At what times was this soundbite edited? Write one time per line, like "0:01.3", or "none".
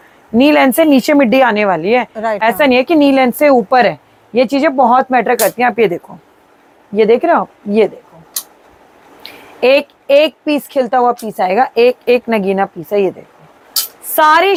none

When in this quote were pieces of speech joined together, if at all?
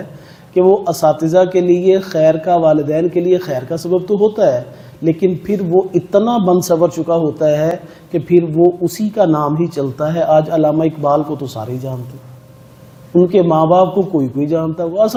none

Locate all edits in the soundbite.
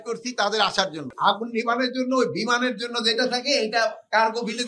0:01.0

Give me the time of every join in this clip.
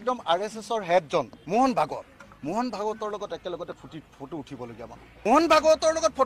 0:01.4
0:05.3

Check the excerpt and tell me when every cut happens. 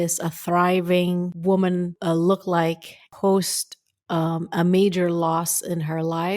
0:01.3
0:01.9
0:03.1

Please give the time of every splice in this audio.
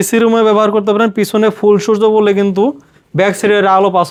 none

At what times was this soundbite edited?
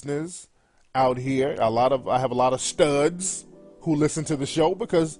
none

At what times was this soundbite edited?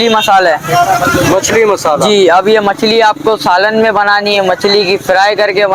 none

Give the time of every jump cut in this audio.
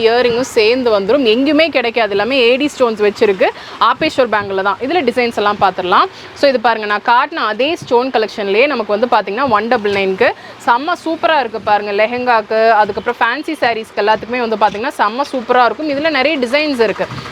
none

